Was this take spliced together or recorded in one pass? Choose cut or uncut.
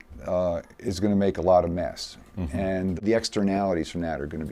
cut